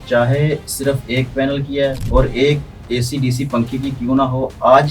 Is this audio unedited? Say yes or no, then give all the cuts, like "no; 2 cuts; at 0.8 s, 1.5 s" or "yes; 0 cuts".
no; 1 cut; at 2.0 s